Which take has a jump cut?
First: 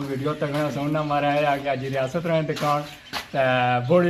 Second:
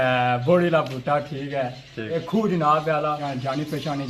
second; 2 cuts; at 2.2 s, 3.2 s

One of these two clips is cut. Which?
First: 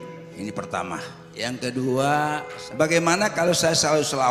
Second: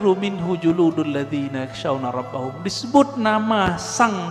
first; 2 cuts; at 1.3 s, 2.5 s

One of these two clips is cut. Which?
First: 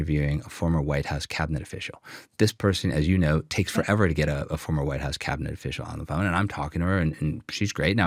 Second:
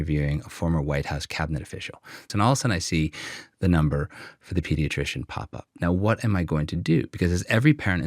second; 1 cut; at 2.3 s

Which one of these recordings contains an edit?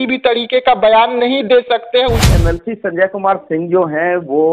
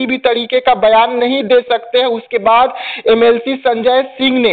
first; 1 cut; at 2.3 s

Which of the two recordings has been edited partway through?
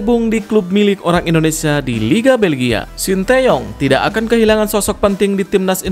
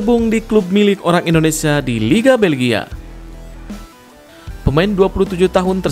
first; 1 cut; at 2.9 s

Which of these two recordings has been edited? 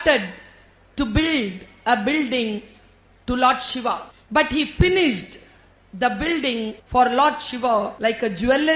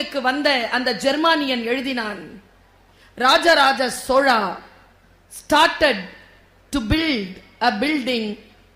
first; 3 cuts; at 4.1 s, 6.8 s, 7.9 s

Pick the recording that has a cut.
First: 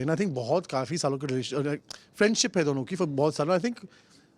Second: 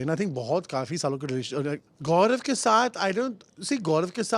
second; 1 cut; at 1.9 s

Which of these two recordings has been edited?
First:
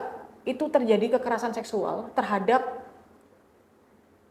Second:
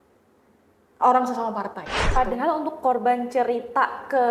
second; 1 cut; at 2.1 s

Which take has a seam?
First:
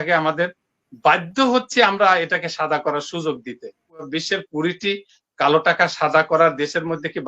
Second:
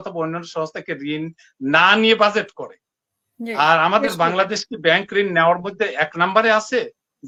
first; 1 cut; at 4.1 s

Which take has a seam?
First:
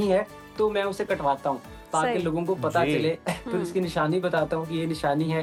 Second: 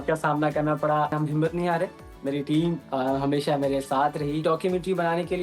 second; 2 cuts; at 1.1 s, 4.4 s

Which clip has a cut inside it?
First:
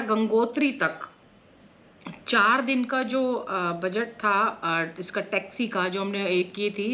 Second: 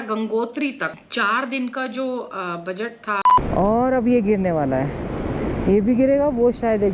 second; 2 cuts; at 1.0 s, 3.3 s

